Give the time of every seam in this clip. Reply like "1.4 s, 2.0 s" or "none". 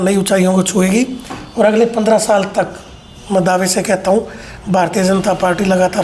none

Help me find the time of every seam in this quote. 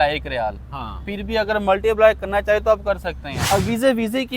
3.4 s

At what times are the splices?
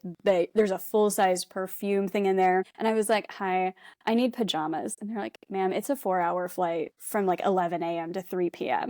2.7 s, 7.0 s

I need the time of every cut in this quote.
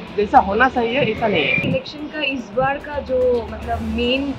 1.6 s

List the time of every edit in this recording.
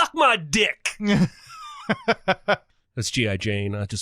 2.6 s

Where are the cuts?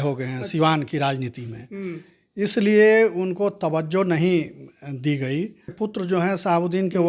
5.8 s

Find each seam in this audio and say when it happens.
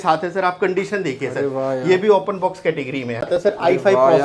3.2 s

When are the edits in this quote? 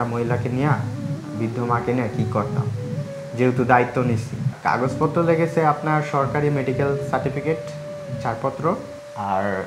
none

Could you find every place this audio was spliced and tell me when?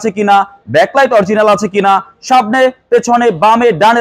none

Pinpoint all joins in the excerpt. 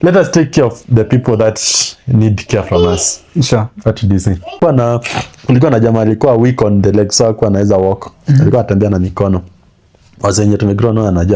4.6 s

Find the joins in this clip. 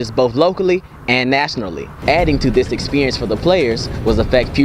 1.9 s

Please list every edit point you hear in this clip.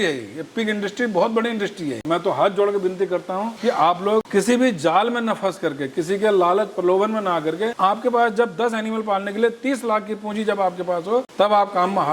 2.0 s, 3.5 s, 4.3 s, 7.7 s, 11.3 s

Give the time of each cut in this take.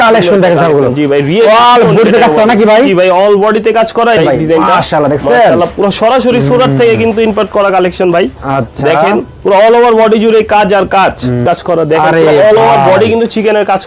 4.2 s, 11.4 s

